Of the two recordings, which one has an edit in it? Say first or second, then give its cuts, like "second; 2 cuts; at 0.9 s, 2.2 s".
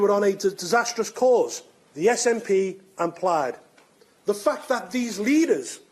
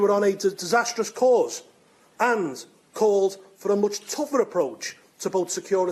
second; 1 cut; at 1.9 s